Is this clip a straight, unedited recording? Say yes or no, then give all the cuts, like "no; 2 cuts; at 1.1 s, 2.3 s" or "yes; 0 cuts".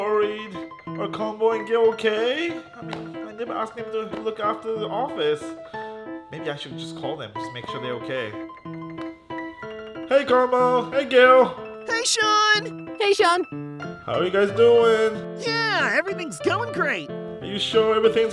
yes; 0 cuts